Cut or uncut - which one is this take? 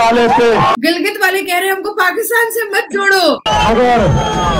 cut